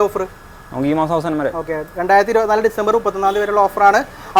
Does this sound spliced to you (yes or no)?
no